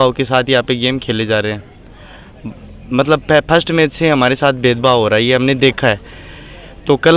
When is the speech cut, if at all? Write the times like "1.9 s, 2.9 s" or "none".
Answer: none